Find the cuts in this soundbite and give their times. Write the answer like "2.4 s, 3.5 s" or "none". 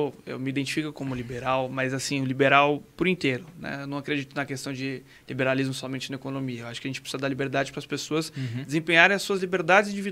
none

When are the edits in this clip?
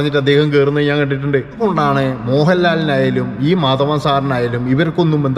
1.6 s

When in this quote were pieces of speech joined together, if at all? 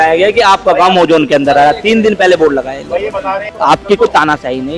3.5 s

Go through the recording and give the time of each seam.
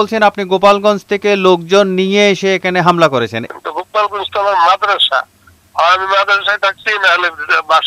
3.4 s

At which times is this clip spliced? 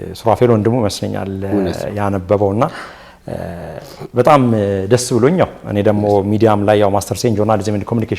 none

